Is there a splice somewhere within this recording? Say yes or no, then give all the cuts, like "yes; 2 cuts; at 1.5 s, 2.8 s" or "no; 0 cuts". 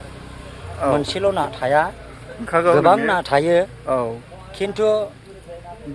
no; 0 cuts